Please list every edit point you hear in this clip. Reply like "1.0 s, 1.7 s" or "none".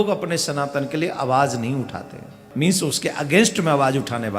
2.4 s